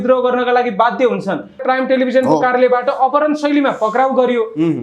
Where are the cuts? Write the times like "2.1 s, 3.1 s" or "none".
1.6 s